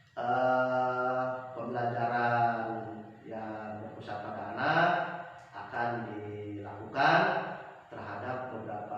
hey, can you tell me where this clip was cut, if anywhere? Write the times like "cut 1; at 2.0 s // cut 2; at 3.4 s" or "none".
cut 1; at 3.9 s